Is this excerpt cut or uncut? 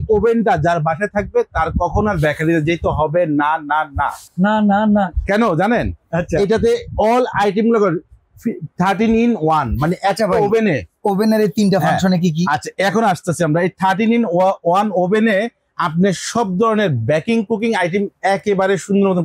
uncut